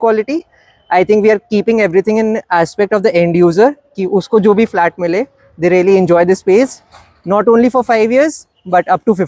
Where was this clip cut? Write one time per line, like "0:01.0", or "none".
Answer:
none